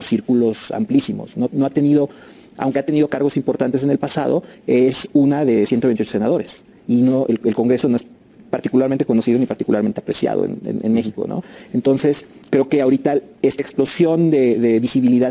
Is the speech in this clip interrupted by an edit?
no; 0 cuts

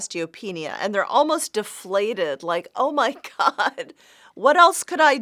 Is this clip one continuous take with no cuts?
yes; 0 cuts

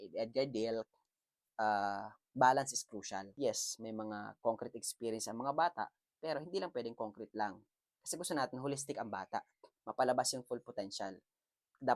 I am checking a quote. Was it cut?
no; 0 cuts

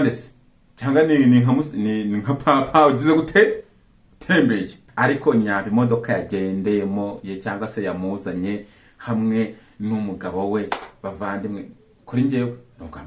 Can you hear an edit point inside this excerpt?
yes; 1 cut; at 4.8 s

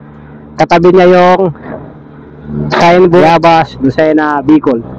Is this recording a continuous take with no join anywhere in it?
no; 1 cut; at 3.2 s

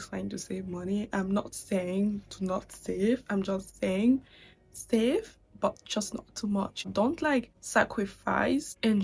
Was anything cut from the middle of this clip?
no; 0 cuts

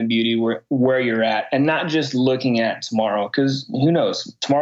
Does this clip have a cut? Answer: no; 0 cuts

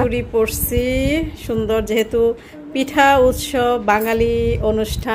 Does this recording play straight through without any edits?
yes; 0 cuts

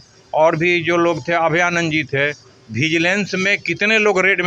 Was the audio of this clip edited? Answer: no; 0 cuts

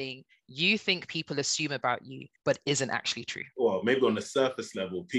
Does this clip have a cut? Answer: no; 0 cuts

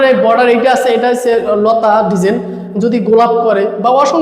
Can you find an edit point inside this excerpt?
no; 0 cuts

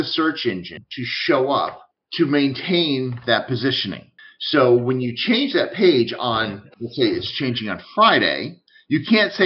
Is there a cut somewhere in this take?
no; 0 cuts

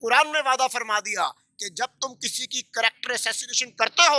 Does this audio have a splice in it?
no; 0 cuts

